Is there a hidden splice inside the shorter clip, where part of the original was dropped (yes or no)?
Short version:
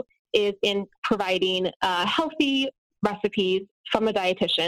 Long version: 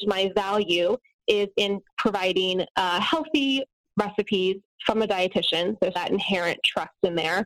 no